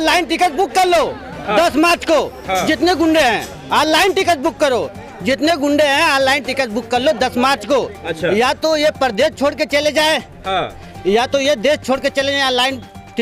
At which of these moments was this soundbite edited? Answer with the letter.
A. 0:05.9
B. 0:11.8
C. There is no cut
C